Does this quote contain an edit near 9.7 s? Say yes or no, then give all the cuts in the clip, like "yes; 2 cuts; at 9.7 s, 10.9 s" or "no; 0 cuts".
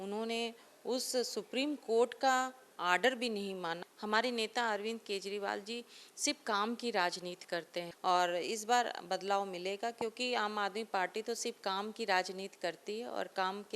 no; 2 cuts; at 3.9 s, 7.9 s